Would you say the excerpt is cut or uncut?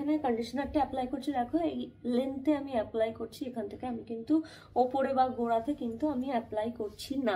uncut